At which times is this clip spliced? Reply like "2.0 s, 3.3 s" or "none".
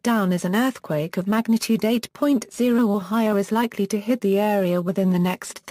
3.1 s